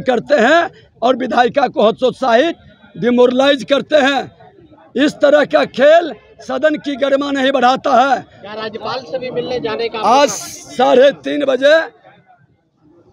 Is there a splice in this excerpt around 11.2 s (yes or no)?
no